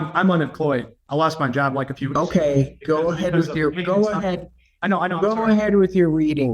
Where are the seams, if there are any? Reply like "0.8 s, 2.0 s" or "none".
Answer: 1.0 s